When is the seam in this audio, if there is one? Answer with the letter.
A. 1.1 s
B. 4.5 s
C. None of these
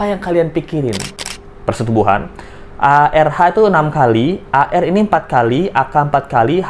A